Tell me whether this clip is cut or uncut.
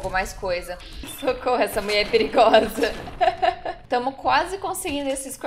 cut